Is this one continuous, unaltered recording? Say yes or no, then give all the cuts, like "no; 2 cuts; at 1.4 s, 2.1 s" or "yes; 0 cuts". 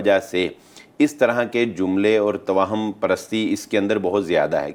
yes; 0 cuts